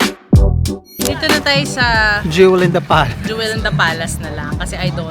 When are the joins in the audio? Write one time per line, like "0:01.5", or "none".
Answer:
0:01.3